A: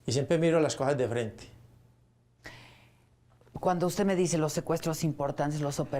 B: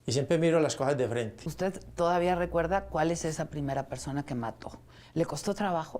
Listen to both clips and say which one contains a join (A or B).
B